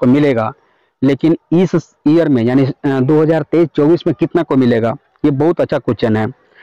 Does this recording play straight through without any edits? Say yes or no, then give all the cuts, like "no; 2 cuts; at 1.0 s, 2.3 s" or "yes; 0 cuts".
yes; 0 cuts